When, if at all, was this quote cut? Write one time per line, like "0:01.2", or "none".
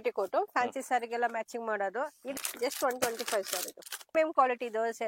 0:02.4
0:04.1